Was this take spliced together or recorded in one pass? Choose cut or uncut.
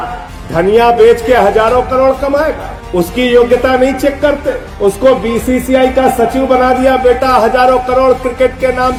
uncut